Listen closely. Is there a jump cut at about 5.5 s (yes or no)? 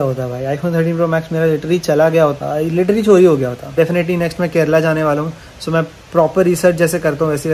no